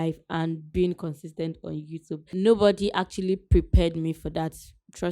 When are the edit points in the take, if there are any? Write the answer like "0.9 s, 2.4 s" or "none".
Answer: 2.2 s